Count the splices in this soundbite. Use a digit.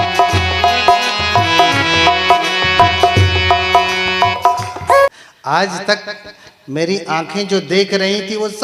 1